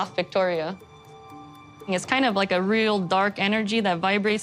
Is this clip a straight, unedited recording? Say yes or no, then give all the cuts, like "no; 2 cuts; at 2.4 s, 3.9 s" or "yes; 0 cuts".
yes; 0 cuts